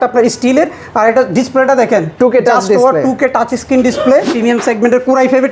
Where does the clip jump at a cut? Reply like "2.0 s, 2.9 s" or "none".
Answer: 4.3 s